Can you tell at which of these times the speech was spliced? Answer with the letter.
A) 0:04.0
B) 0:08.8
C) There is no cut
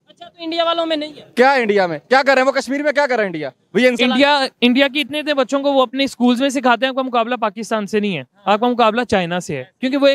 A